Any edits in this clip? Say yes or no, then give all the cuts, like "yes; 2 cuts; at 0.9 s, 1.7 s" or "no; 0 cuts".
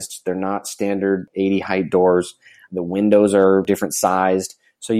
yes; 1 cut; at 3.6 s